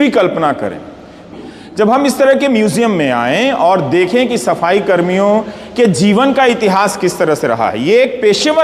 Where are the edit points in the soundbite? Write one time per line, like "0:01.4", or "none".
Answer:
0:01.3